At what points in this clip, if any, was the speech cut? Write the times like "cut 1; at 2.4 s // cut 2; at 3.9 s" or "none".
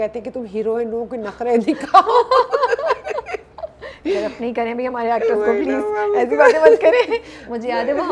none